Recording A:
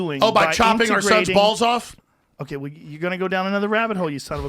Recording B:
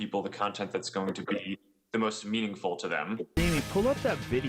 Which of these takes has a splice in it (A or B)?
B